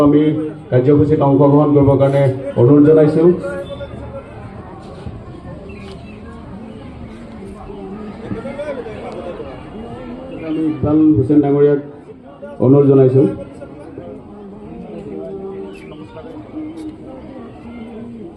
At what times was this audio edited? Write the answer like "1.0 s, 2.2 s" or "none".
10.6 s